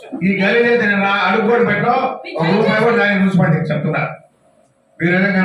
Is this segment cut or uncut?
uncut